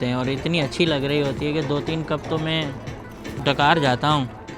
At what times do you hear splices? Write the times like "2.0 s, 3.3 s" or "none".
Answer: 3.4 s